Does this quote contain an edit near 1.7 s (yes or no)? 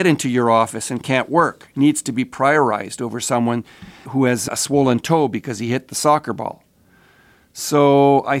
no